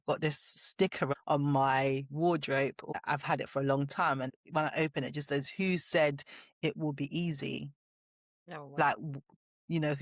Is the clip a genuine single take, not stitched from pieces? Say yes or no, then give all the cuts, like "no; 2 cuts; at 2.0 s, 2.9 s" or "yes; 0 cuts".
no; 3 cuts; at 1.1 s, 2.9 s, 4.3 s